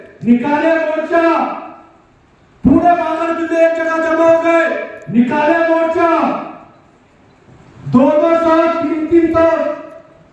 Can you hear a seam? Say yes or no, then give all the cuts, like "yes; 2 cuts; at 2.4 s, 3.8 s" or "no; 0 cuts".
no; 0 cuts